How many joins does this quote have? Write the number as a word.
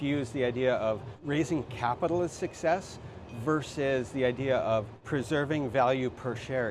two